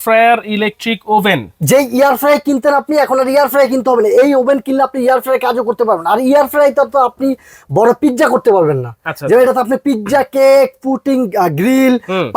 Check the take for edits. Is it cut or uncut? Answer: uncut